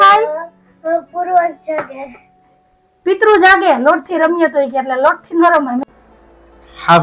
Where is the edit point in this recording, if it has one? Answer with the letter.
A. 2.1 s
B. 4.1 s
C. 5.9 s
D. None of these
C